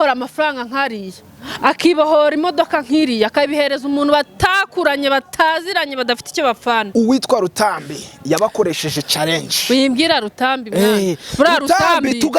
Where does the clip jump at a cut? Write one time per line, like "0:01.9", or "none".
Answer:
0:06.9